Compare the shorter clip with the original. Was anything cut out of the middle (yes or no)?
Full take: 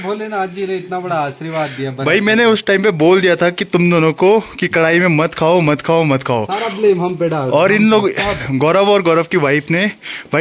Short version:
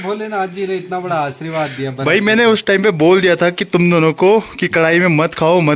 no